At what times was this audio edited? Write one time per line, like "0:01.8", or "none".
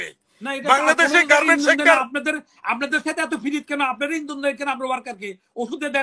none